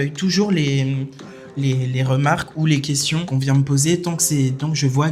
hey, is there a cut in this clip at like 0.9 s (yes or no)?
no